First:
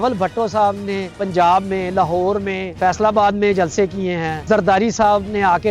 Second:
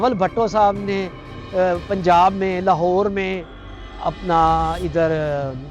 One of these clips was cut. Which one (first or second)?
first